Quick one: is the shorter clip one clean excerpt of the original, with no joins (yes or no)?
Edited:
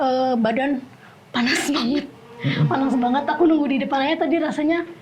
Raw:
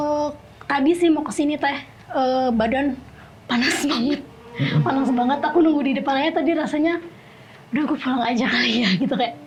yes